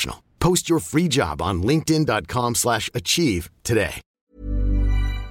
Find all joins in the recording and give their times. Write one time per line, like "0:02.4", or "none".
0:04.2

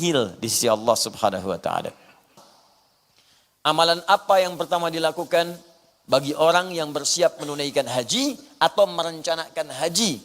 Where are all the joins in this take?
0:02.4

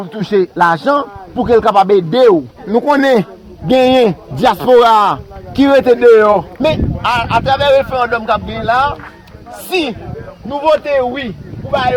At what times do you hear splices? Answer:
0:02.7
0:06.5

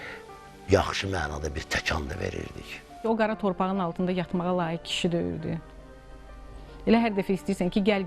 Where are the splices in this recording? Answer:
0:02.8

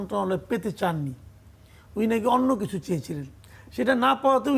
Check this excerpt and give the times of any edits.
none

